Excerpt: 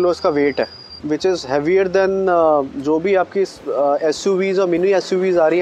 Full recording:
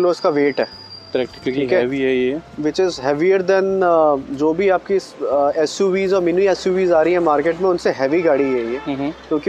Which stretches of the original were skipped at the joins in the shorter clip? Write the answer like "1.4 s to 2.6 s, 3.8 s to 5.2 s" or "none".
0.9 s to 2.5 s